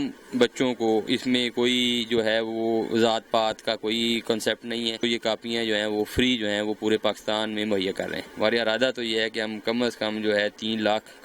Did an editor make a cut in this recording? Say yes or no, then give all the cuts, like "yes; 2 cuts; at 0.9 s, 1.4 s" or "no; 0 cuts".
yes; 2 cuts; at 5.0 s, 8.2 s